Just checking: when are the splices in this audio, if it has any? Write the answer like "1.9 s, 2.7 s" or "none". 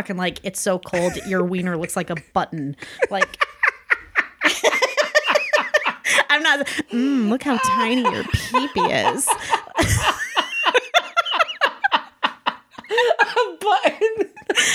none